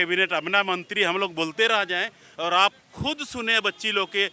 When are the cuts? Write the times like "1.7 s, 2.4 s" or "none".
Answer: none